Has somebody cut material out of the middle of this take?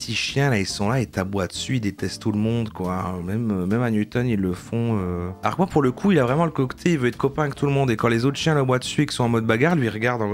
no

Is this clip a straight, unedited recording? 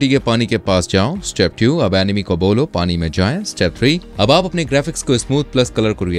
yes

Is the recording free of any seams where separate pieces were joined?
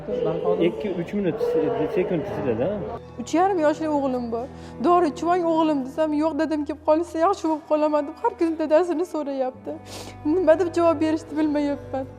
no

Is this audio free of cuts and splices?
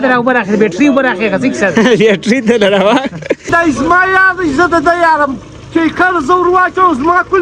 no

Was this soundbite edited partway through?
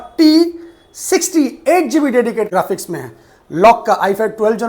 yes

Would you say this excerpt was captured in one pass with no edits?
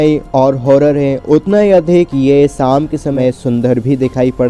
no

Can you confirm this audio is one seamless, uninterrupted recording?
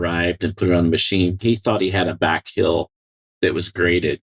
no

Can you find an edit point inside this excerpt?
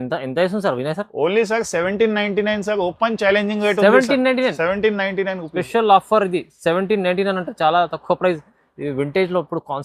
no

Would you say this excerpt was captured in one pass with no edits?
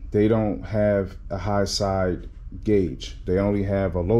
yes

